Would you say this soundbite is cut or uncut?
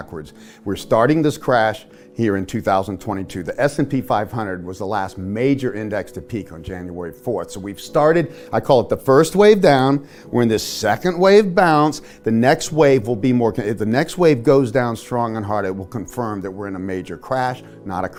uncut